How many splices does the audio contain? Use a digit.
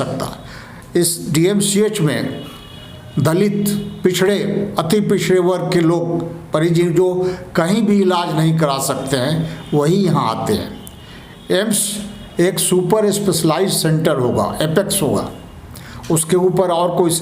0